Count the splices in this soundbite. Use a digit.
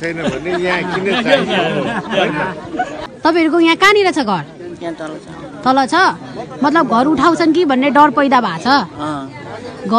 1